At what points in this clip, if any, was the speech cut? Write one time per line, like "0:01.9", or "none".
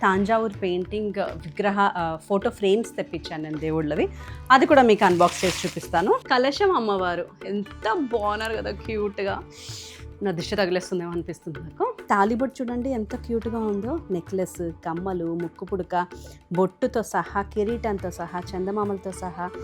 0:06.2
0:12.0